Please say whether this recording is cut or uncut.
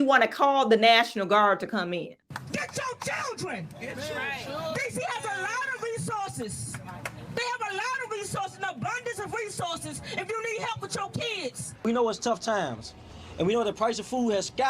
cut